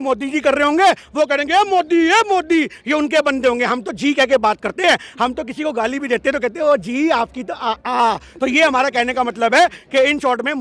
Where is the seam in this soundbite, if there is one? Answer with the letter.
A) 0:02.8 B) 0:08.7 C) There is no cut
C